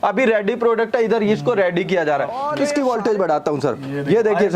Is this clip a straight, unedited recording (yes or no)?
no